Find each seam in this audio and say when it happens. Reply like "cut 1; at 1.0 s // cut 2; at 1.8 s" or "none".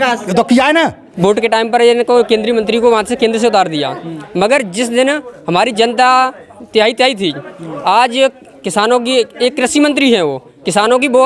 cut 1; at 1.1 s